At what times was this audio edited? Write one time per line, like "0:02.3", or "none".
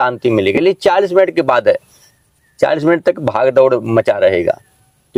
none